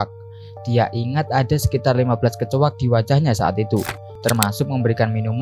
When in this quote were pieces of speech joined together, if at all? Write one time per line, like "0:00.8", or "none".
0:04.1